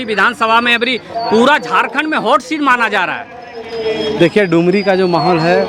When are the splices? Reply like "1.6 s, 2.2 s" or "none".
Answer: none